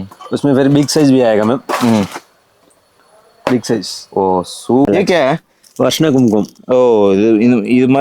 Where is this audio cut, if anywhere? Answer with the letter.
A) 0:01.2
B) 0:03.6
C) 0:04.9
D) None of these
C